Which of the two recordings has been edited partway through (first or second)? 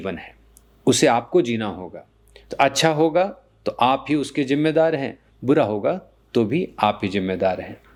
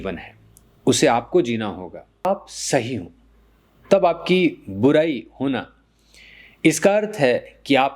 second